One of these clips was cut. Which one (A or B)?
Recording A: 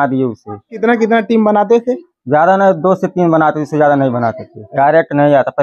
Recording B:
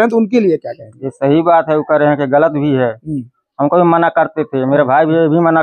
A